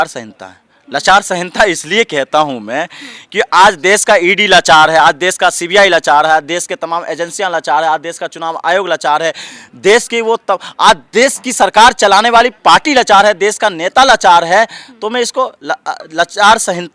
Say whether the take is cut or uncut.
uncut